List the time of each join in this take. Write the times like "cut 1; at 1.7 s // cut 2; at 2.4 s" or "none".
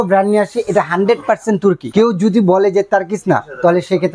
cut 1; at 1.8 s